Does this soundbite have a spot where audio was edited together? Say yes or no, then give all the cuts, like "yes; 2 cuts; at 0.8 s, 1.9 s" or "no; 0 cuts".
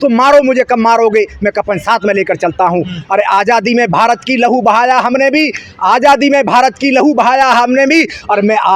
no; 0 cuts